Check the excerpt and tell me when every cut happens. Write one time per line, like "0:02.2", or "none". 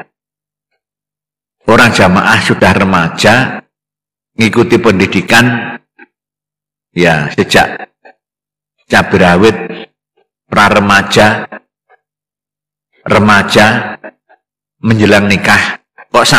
none